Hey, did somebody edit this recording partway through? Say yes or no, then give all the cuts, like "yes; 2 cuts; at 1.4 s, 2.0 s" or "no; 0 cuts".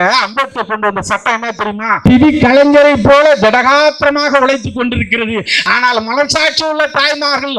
yes; 1 cut; at 2.0 s